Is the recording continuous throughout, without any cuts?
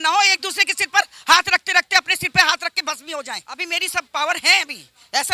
no; 1 cut; at 3.6 s

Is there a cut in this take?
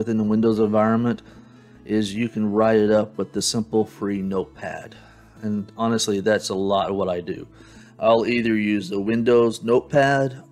no; 0 cuts

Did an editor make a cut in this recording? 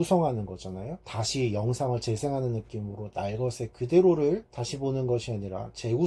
no; 0 cuts

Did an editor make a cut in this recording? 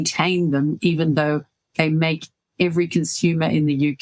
yes; 1 cut; at 1.8 s

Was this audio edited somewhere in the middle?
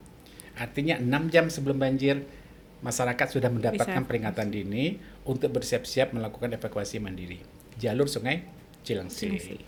no; 0 cuts

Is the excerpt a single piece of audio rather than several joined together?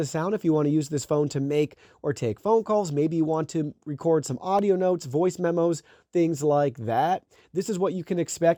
yes; 0 cuts

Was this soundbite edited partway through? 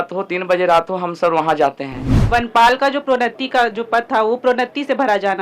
yes; 1 cut; at 2.1 s

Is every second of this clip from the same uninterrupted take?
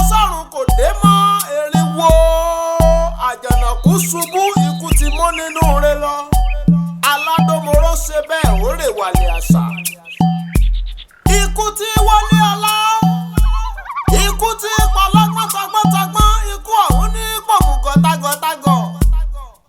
no; 1 cut; at 6.6 s

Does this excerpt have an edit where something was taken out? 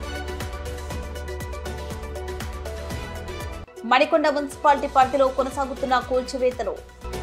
no; 0 cuts

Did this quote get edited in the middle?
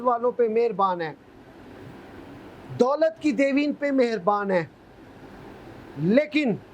no; 0 cuts

